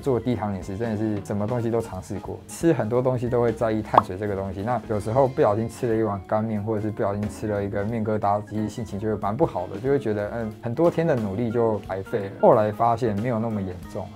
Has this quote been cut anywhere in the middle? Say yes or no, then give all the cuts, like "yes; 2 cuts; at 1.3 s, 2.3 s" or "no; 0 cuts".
no; 0 cuts